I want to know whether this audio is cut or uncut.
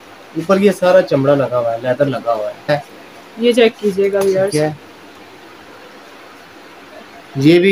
cut